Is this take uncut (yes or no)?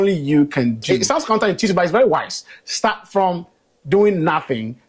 no